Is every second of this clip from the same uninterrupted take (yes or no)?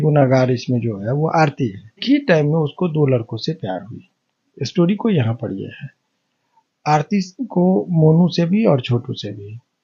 no